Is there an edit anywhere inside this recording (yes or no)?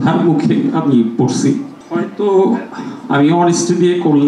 yes